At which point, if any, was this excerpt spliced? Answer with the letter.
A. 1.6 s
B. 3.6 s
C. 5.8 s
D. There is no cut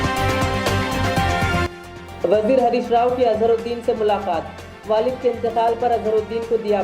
A